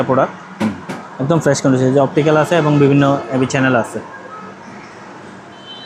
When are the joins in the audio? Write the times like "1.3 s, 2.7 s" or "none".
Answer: none